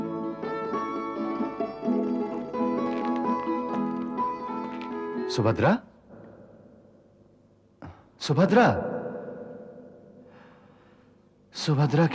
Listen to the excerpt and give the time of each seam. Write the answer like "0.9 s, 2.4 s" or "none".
none